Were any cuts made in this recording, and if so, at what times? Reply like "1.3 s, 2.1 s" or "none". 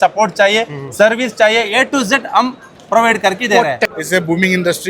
3.9 s